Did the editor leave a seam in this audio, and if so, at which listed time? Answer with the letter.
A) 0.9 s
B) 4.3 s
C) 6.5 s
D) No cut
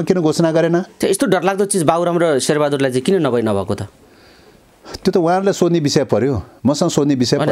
A